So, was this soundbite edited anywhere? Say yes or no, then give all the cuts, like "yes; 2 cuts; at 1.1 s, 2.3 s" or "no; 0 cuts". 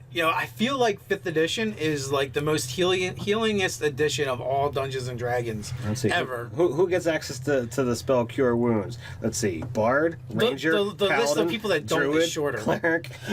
yes; 1 cut; at 3.1 s